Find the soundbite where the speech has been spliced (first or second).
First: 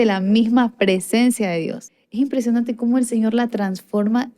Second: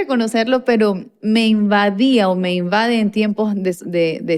first